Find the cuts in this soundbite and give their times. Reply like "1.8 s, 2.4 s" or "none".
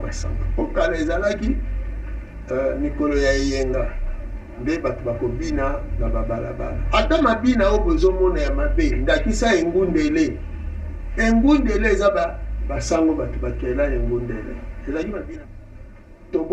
15.3 s